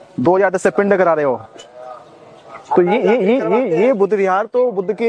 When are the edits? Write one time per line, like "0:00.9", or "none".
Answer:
none